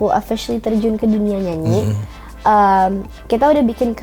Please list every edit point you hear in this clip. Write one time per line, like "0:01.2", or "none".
none